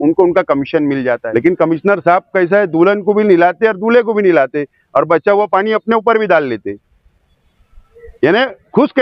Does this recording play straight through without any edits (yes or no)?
no